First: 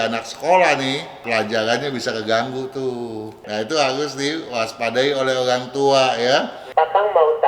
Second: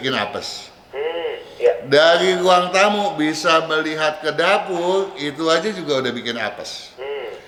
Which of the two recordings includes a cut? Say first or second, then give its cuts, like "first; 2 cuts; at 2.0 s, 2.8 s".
first; 3 cuts; at 1.1 s, 3.3 s, 6.6 s